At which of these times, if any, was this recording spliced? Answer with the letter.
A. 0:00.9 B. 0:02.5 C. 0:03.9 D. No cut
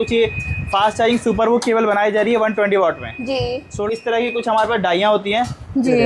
C